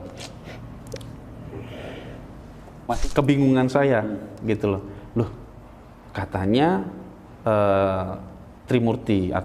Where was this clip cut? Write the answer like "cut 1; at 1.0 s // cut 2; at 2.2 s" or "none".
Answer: cut 1; at 3.0 s